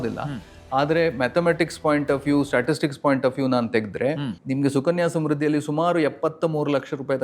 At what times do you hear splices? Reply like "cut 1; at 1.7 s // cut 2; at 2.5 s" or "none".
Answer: cut 1; at 4.3 s